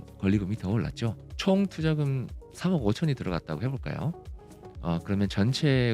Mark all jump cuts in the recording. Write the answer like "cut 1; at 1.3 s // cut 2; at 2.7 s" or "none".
cut 1; at 1.3 s